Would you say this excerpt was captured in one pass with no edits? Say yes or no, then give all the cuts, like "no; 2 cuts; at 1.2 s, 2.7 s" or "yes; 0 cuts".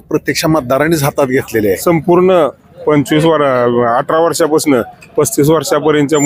no; 1 cut; at 1.8 s